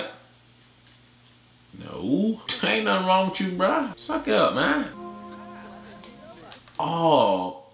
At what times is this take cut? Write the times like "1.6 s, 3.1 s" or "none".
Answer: 1.7 s, 2.5 s, 4.0 s, 4.9 s